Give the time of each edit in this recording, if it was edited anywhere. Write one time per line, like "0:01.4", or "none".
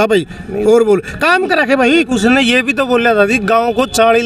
none

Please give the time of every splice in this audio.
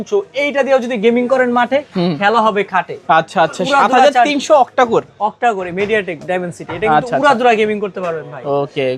none

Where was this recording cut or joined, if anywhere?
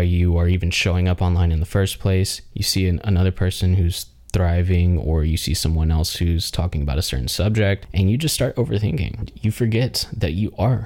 0:07.9
0:09.3

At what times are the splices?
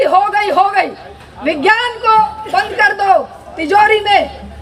none

